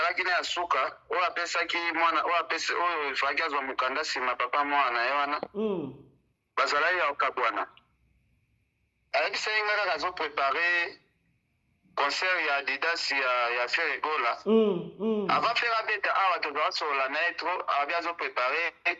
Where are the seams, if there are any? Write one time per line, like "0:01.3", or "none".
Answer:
0:09.0